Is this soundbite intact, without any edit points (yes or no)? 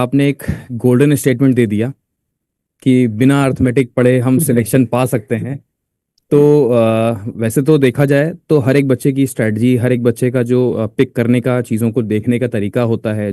yes